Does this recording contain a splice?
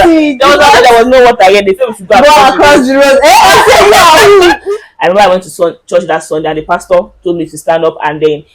yes; 1 cut; at 4.6 s

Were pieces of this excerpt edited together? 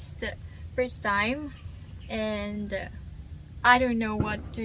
no; 0 cuts

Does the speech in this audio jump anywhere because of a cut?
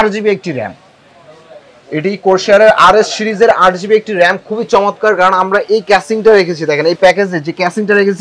no; 0 cuts

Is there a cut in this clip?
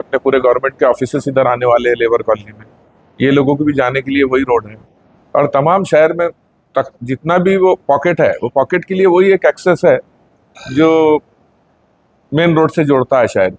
no; 0 cuts

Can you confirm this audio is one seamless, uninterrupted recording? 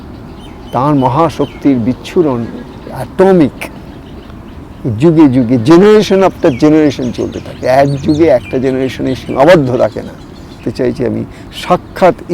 no; 1 cut; at 10.7 s

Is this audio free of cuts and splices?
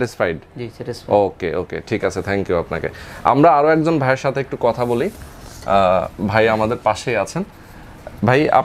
yes; 0 cuts

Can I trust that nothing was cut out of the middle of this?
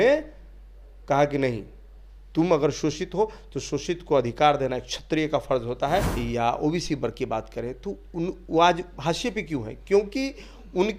no; 1 cut; at 6.1 s

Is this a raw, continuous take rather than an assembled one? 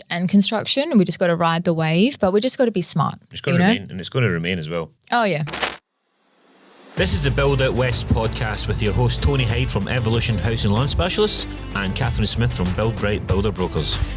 no; 2 cuts; at 5.0 s, 5.8 s

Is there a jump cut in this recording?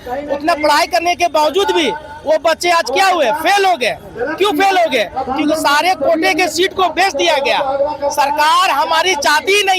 no; 0 cuts

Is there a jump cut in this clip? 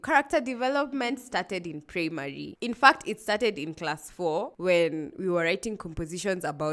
no; 0 cuts

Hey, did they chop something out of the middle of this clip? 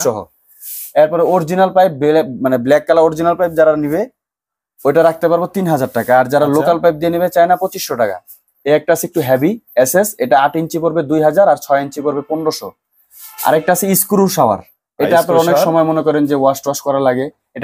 no; 0 cuts

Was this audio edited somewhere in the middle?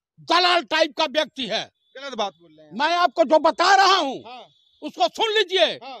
no; 0 cuts

